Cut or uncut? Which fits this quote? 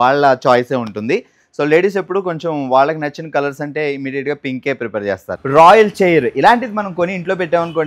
cut